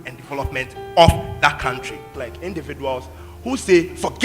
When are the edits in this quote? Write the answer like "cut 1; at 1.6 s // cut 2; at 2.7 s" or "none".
cut 1; at 2.0 s